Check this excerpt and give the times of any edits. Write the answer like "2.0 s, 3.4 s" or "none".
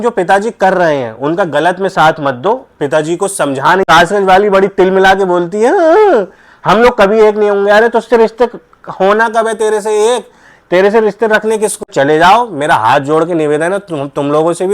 3.9 s, 11.8 s